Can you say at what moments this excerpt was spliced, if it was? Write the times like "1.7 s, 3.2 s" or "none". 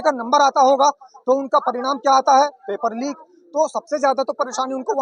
none